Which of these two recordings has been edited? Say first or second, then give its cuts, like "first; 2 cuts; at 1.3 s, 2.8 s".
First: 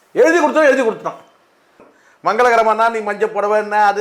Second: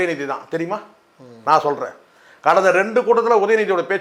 first; 1 cut; at 1.9 s